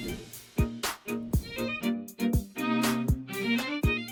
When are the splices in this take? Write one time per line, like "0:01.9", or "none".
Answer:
none